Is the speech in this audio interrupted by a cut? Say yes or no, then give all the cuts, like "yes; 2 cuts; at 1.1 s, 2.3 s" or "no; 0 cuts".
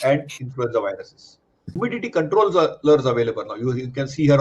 yes; 1 cut; at 1.7 s